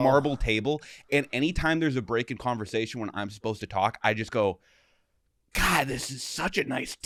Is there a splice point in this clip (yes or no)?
no